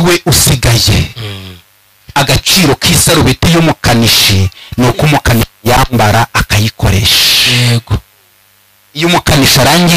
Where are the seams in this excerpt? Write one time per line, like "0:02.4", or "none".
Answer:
none